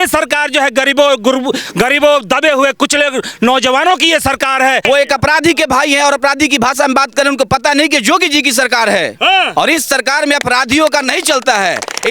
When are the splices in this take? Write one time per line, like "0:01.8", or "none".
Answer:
0:04.8